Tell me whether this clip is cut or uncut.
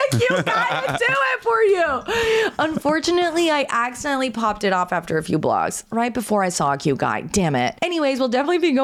uncut